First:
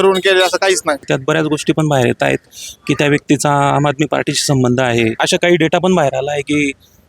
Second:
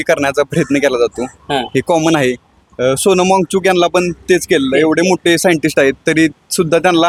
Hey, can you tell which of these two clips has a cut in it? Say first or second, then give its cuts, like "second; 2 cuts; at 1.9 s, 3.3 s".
first; 2 cuts; at 1.1 s, 5.2 s